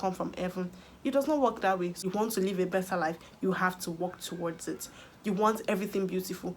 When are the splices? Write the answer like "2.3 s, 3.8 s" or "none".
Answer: 2.0 s